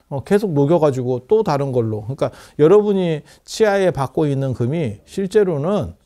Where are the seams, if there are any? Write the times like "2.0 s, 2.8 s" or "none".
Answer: none